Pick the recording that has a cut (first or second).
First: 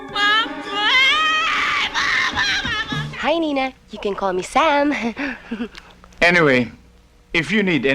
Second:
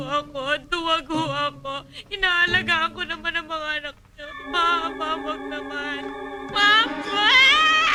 first